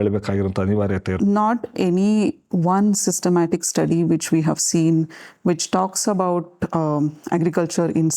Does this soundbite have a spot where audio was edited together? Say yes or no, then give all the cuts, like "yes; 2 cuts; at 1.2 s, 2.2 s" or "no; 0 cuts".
yes; 1 cut; at 1.2 s